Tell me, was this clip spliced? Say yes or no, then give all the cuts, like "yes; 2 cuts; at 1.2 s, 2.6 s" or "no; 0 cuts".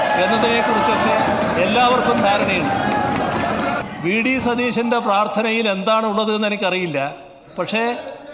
yes; 1 cut; at 3.8 s